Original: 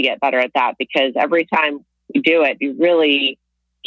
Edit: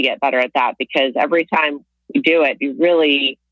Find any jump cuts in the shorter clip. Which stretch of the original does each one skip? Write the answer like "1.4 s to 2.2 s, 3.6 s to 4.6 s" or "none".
none